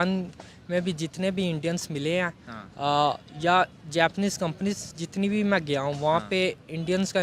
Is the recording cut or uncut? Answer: uncut